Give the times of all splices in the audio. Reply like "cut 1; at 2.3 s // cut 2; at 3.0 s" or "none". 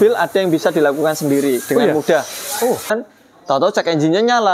cut 1; at 2.9 s